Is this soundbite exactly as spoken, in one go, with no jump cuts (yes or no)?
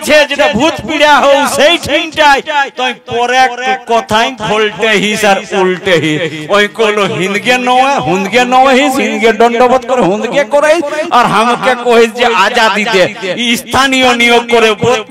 yes